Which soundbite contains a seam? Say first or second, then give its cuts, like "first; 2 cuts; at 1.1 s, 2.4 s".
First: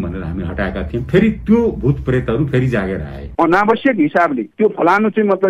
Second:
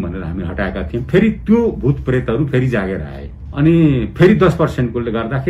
first; 1 cut; at 3.3 s